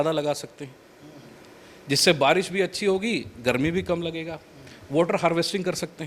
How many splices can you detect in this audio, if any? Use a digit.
0